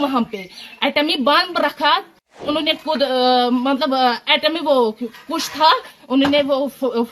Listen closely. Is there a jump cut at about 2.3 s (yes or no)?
yes